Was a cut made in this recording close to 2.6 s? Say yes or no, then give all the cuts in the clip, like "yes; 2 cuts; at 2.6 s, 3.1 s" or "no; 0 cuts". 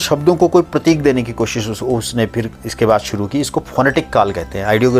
no; 0 cuts